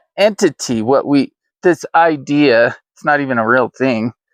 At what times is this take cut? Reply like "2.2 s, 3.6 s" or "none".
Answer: none